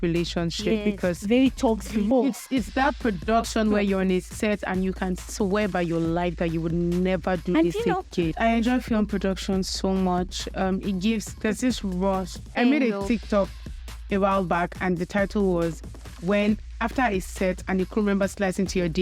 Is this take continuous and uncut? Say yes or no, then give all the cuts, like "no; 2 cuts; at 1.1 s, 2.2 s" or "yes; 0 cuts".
no; 3 cuts; at 2.1 s, 8.3 s, 12.4 s